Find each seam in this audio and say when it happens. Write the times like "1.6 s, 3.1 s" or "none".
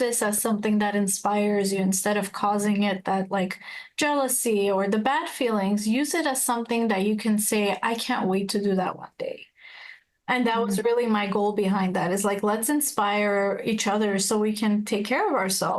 none